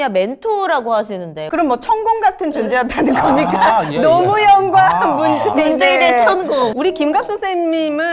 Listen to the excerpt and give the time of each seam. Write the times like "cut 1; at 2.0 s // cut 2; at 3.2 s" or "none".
cut 1; at 1.4 s // cut 2; at 6.7 s